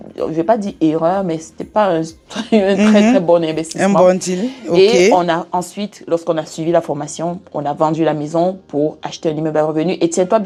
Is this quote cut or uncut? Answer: uncut